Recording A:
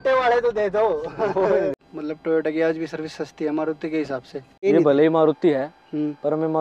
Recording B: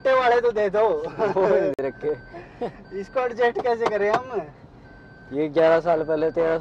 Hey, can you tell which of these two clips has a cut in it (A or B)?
A